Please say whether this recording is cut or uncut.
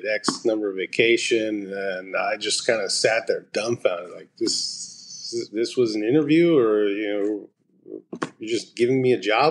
uncut